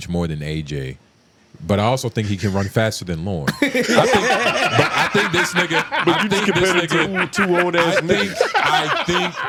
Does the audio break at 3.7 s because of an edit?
no; 0 cuts

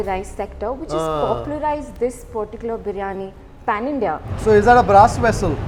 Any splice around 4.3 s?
yes; 1 cut; at 4.3 s

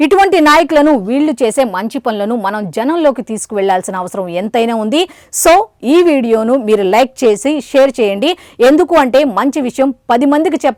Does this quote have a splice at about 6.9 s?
no; 0 cuts

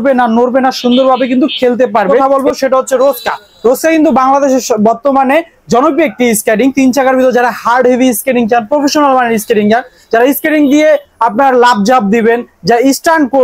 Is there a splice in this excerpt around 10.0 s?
no; 1 cut; at 2.1 s

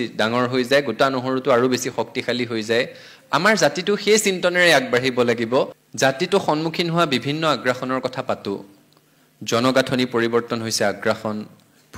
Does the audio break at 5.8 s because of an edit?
yes; 1 cut; at 5.8 s

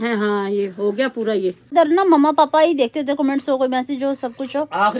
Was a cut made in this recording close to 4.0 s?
no; 1 cut; at 1.7 s

